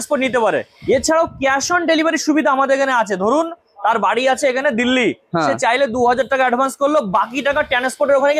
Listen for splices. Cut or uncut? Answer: uncut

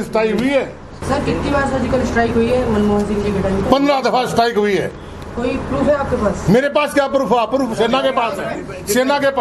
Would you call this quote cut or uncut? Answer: cut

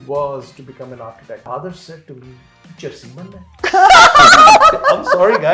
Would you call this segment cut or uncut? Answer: cut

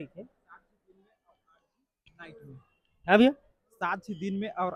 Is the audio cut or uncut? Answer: uncut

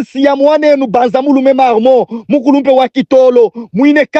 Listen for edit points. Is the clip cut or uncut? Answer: uncut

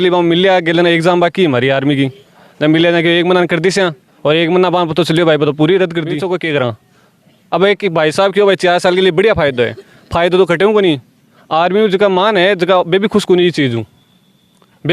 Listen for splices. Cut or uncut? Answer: cut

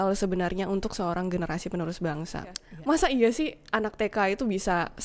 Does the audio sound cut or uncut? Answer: cut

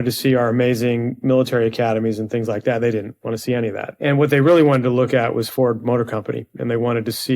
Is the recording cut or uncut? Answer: cut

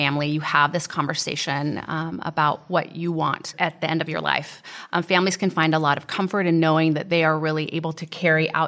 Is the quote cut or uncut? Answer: uncut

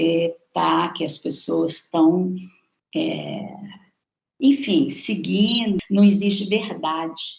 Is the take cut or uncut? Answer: cut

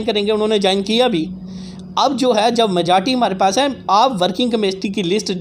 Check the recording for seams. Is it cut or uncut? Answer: uncut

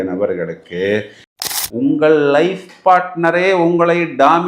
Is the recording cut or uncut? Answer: cut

